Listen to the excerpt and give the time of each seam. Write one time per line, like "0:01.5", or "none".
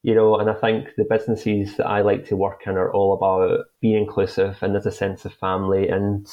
0:03.7